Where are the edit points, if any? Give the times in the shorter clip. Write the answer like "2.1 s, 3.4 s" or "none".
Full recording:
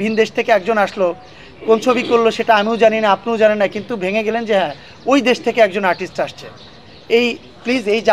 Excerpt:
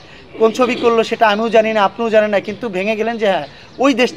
none